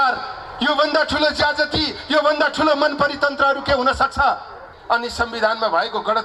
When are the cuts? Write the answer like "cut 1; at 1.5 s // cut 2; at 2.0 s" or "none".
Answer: cut 1; at 4.7 s